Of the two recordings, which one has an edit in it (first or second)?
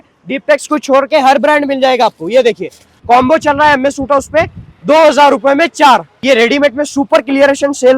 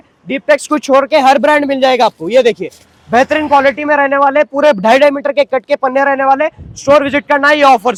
first